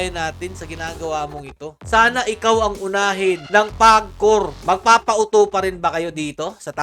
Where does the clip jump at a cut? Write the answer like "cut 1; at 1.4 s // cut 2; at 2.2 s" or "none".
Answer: cut 1; at 4.5 s